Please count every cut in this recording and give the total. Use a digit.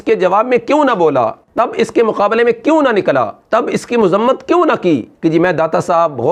2